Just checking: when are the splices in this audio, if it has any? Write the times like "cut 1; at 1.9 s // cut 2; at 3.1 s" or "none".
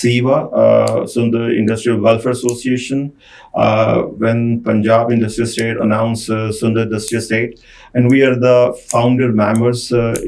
none